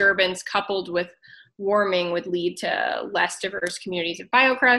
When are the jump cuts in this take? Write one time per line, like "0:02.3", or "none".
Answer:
0:03.7

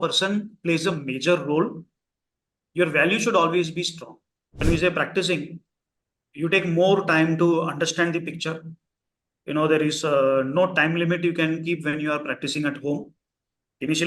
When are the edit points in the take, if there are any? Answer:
0:04.6

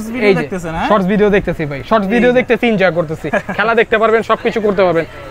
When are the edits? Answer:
none

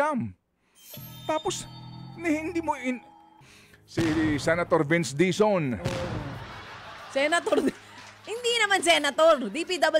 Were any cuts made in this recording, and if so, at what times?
0:03.4

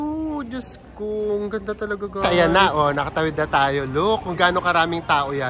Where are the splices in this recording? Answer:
0:02.3

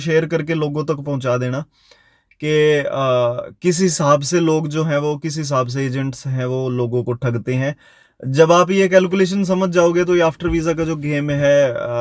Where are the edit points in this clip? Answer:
none

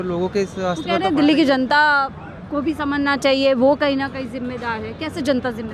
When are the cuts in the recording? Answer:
none

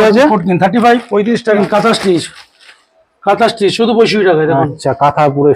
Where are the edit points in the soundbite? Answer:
0:01.6

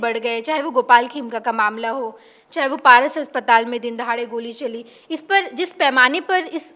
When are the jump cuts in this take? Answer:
none

